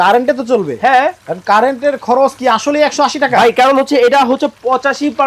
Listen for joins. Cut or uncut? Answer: uncut